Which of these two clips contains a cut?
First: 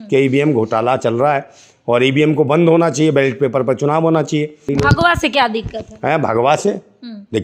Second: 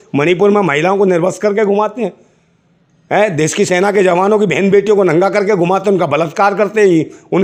first; 1 cut; at 4.6 s

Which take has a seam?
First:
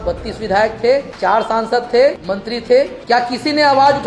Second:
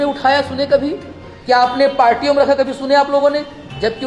first; 2 cuts; at 1.1 s, 2.6 s

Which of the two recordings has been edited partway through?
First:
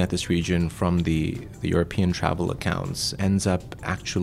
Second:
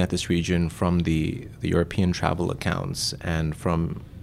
first; 1 cut; at 3.1 s

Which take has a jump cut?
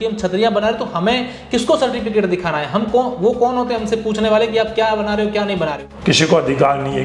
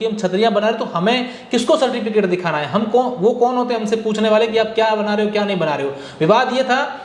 first; 1 cut; at 5.9 s

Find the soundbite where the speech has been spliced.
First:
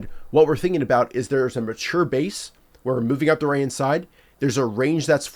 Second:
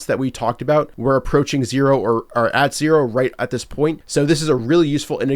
second; 2 cuts; at 0.9 s, 4.0 s

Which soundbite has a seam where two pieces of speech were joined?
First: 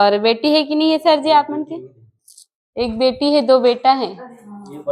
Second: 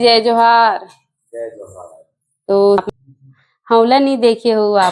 second; 1 cut; at 2.8 s

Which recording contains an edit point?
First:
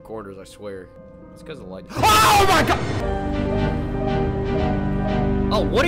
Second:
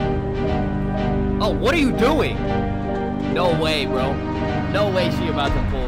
first; 2 cuts; at 1.0 s, 3.0 s

